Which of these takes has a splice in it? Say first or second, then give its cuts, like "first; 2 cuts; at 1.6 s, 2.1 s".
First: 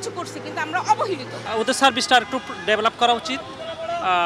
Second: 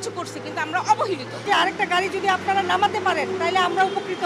first; 1 cut; at 1.4 s